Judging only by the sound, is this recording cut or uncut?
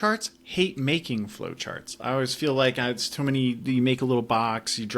uncut